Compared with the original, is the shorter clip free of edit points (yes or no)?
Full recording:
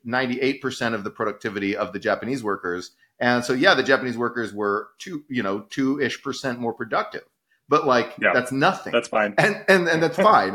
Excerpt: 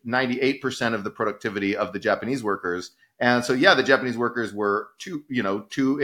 yes